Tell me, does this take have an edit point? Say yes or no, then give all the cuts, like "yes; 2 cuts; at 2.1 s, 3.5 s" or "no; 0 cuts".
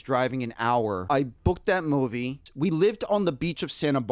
yes; 2 cuts; at 1.0 s, 2.4 s